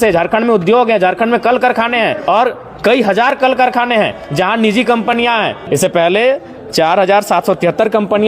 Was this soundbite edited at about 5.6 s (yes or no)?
yes